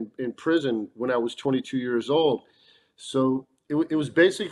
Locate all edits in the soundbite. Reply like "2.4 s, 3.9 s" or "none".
none